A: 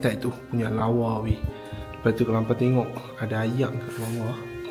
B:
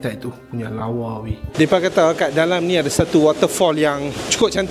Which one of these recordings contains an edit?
B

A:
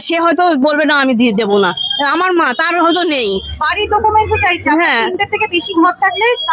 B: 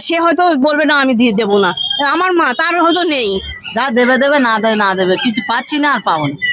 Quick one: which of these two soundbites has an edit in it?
B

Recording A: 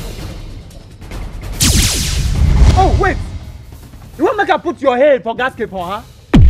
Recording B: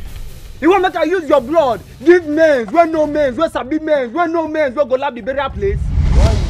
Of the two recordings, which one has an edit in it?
A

